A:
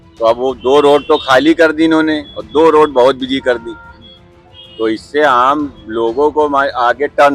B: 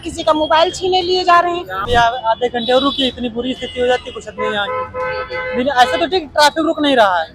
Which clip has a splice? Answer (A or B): B